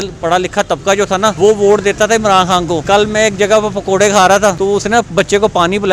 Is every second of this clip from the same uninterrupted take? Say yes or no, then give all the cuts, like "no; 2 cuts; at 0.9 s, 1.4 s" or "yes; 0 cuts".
no; 3 cuts; at 1.3 s, 2.8 s, 4.6 s